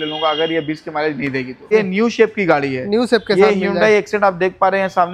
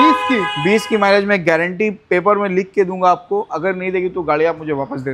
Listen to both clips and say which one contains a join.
first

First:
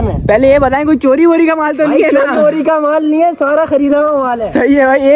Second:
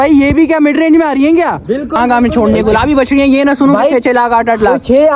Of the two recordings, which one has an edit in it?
second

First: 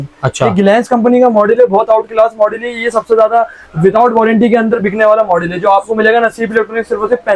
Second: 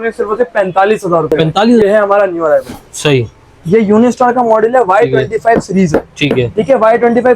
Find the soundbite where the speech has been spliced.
second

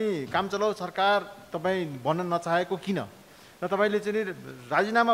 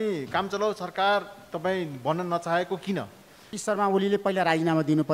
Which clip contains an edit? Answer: second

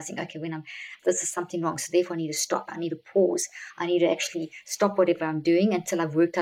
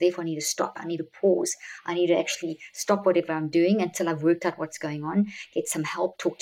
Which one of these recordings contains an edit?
first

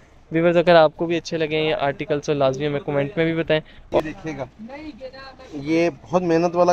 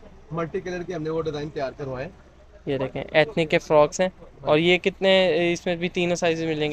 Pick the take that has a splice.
first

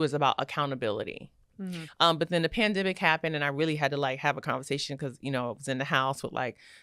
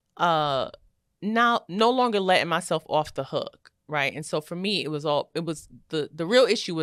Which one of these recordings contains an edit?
first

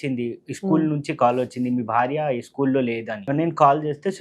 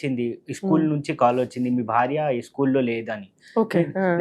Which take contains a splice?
first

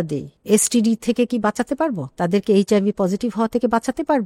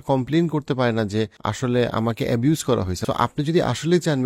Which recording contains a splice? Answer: second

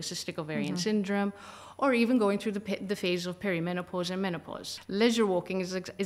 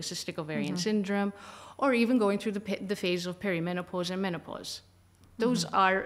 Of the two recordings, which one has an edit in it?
first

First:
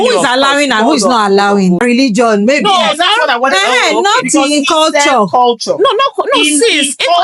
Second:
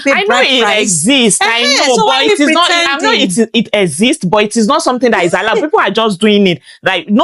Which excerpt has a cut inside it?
first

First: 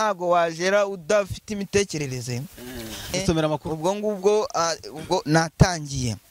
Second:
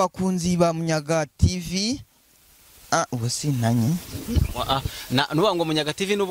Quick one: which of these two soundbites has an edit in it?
first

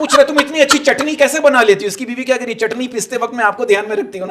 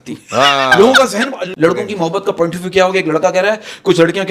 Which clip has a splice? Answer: second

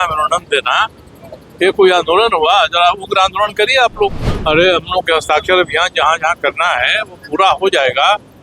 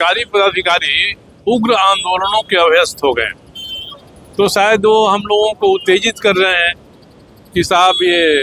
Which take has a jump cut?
first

